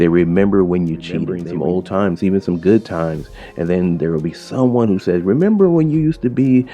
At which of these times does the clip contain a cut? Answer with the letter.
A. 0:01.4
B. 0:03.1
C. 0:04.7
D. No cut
A